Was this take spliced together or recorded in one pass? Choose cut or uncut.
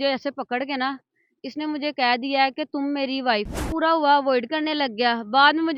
cut